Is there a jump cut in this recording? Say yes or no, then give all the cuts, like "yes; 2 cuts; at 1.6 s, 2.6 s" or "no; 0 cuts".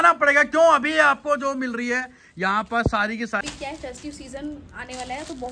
yes; 1 cut; at 3.4 s